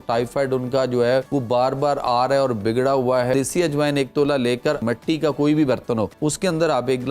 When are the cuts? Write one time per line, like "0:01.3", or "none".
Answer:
0:01.3
0:03.3
0:04.8
0:06.1